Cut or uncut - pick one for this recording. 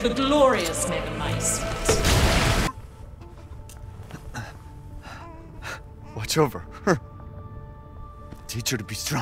cut